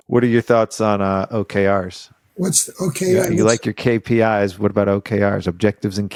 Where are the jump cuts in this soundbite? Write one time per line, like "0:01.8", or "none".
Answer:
none